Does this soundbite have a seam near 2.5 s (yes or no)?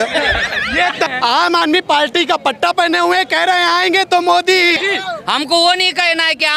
no